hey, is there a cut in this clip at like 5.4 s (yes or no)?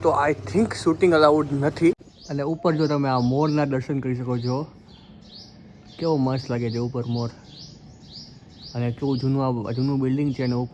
no